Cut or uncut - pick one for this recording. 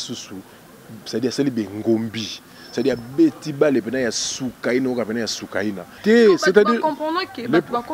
cut